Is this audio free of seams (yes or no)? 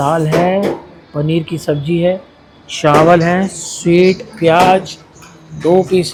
yes